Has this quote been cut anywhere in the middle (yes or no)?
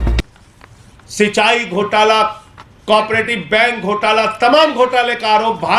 no